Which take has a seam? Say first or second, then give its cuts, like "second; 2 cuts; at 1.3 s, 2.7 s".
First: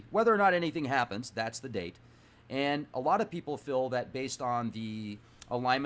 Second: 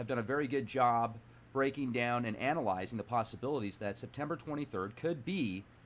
first; 1 cut; at 3.4 s